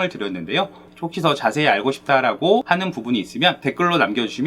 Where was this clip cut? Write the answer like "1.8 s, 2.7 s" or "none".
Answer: 3.1 s